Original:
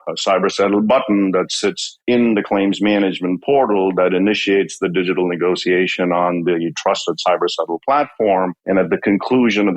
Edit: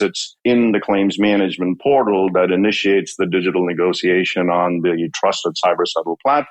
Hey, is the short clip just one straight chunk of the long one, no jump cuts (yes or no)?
yes